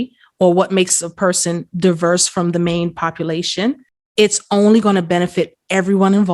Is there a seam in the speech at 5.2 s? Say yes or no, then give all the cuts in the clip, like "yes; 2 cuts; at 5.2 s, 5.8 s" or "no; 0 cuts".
no; 1 cut; at 3.9 s